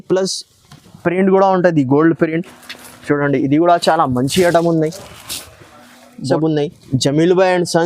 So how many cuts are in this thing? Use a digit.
1